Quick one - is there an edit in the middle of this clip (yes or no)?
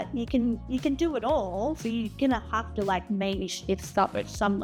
no